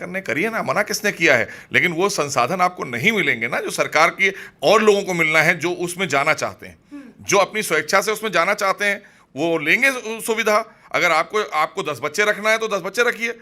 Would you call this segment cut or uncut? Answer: uncut